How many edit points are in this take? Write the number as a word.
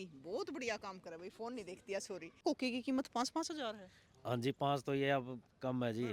one